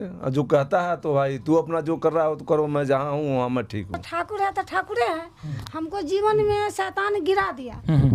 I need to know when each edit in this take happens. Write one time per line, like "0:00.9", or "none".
0:04.0